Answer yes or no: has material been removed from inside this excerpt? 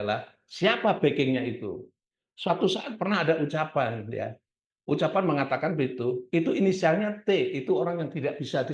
no